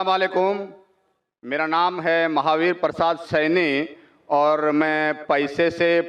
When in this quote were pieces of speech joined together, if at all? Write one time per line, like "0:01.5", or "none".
none

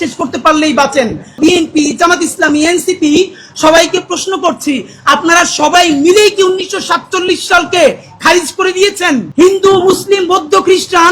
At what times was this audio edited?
0:01.4
0:09.3

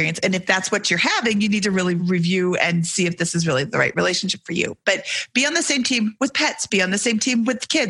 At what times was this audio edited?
none

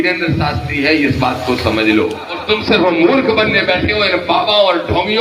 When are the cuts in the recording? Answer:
0:02.3

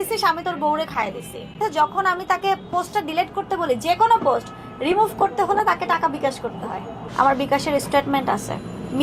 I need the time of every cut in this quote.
0:06.9

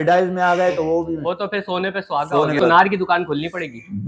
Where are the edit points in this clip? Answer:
0:02.6

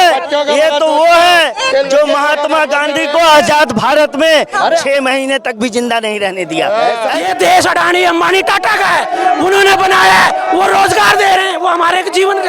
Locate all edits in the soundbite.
0:07.2

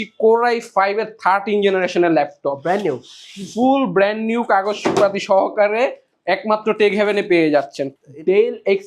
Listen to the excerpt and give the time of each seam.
0:07.9

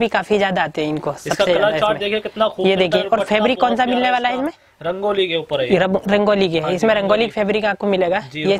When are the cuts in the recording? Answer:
none

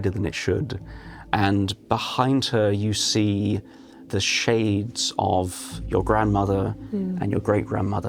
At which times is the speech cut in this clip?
0:01.3
0:04.1

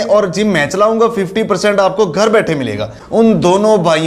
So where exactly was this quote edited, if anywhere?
0:03.0

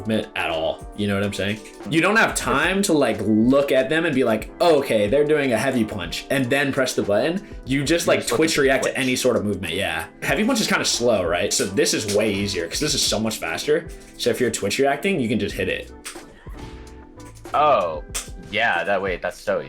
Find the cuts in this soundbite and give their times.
0:01.7
0:10.2

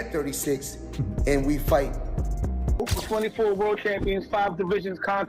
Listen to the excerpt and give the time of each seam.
0:02.8

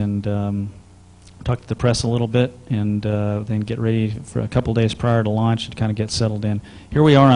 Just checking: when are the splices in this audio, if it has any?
0:05.0

